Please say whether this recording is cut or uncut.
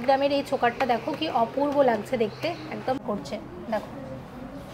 cut